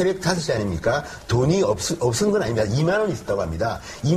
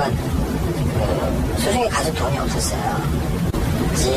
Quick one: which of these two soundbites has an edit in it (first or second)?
second